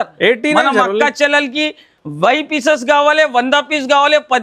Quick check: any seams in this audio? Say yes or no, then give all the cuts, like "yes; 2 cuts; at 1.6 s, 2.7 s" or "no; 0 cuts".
no; 0 cuts